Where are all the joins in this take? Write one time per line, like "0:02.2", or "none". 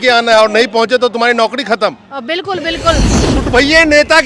0:03.2